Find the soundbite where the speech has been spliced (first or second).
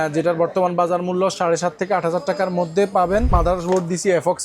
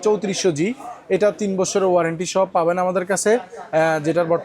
first